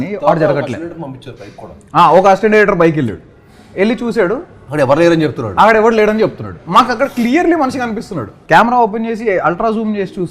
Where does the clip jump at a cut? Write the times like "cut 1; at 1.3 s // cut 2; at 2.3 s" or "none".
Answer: cut 1; at 8.3 s